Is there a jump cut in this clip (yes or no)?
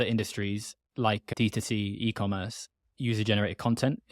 yes